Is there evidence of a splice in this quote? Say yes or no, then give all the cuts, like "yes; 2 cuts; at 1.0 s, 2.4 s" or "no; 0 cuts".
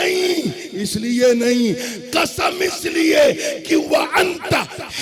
no; 0 cuts